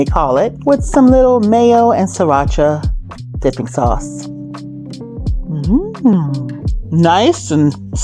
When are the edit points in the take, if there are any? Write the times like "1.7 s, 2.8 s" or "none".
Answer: 4.1 s, 5.4 s